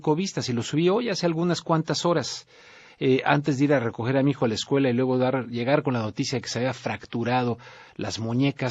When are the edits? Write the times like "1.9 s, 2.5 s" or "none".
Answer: 2.0 s